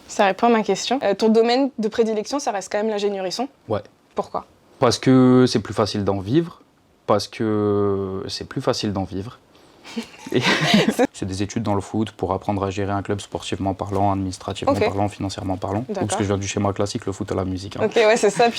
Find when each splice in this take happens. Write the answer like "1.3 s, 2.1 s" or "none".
1.0 s, 4.3 s, 11.0 s